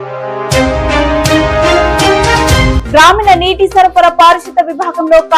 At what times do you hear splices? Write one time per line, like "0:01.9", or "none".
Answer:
0:02.7

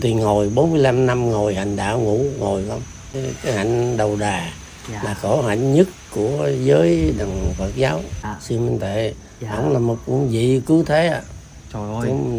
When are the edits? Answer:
0:03.2
0:08.2

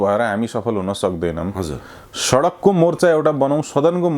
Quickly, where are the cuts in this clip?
none

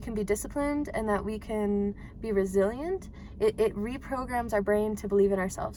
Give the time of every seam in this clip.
none

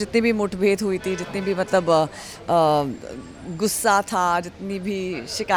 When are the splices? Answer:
none

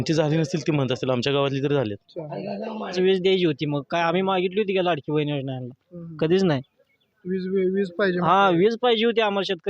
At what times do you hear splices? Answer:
0:02.9

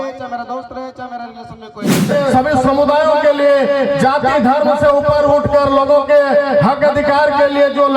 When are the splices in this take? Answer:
0:02.1

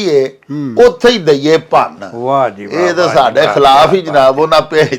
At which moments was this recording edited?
none

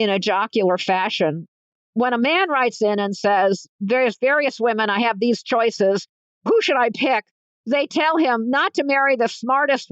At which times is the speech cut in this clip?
0:01.6

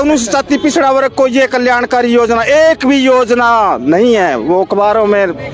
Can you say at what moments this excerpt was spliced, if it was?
none

